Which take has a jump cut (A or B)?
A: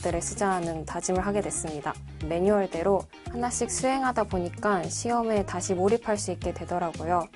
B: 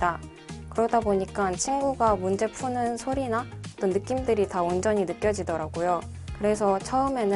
A